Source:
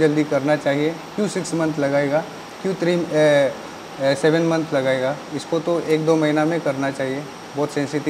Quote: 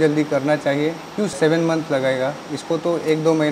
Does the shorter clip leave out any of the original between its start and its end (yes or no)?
yes